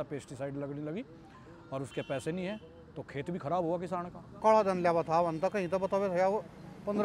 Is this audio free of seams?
no; 1 cut; at 4.4 s

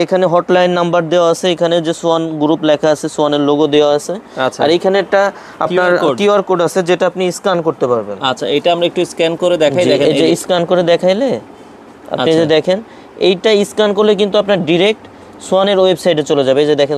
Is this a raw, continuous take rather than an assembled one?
yes; 0 cuts

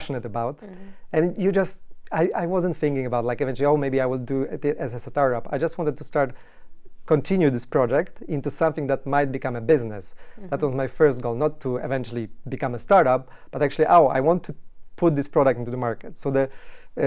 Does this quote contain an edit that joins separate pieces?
no; 0 cuts

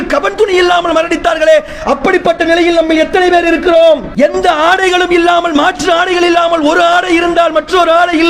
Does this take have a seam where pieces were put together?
yes; 1 cut; at 4.1 s

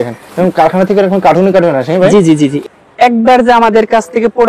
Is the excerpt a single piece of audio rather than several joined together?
no; 1 cut; at 2.6 s

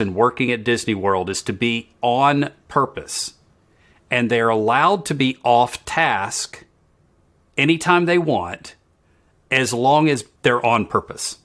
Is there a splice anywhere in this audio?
yes; 1 cut; at 10.3 s

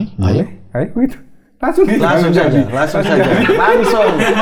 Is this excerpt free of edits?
yes; 0 cuts

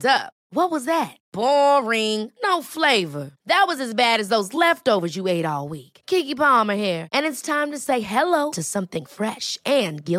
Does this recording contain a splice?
no; 0 cuts

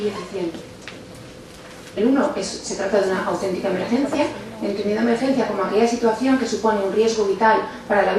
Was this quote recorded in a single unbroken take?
yes; 0 cuts

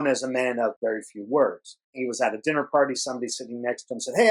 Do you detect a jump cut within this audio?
yes; 2 cuts; at 0.7 s, 1.9 s

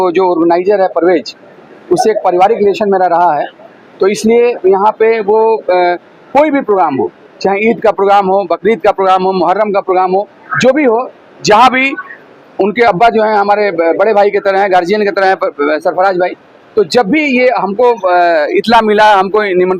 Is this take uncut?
yes; 0 cuts

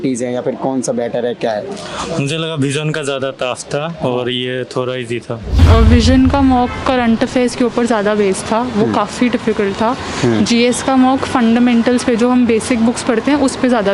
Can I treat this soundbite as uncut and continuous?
no; 1 cut; at 5.5 s

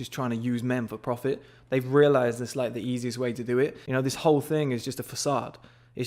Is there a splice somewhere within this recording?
yes; 1 cut; at 3.8 s

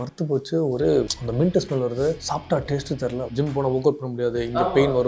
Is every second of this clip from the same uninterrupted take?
no; 3 cuts; at 1.2 s, 2.2 s, 3.3 s

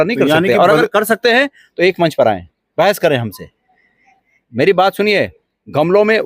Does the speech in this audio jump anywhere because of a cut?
no; 0 cuts

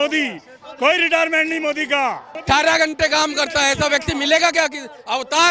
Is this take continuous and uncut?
no; 1 cut; at 2.3 s

